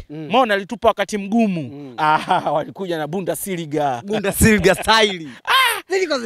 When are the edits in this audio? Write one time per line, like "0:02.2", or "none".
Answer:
none